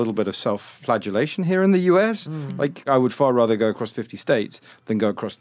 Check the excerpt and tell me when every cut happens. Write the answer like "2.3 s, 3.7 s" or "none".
2.9 s